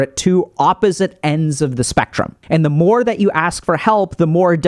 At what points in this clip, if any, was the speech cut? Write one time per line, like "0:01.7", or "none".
0:02.4